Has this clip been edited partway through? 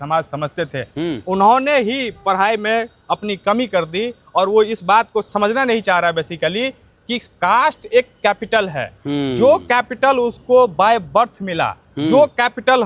yes; 1 cut; at 5.3 s

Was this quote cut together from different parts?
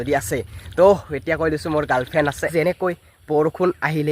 yes; 1 cut; at 2.5 s

